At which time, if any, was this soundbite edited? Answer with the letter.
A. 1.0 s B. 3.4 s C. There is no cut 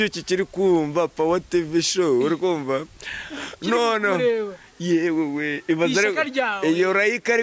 C